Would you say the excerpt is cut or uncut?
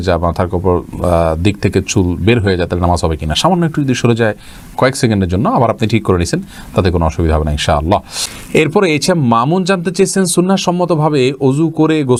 uncut